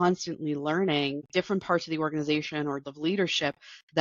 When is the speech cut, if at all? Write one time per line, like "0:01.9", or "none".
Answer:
0:01.3
0:02.9